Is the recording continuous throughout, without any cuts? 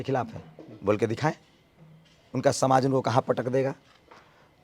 yes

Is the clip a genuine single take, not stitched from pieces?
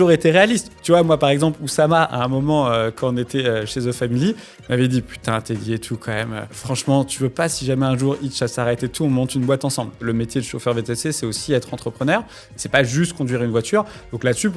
no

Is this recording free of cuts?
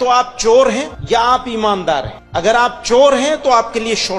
no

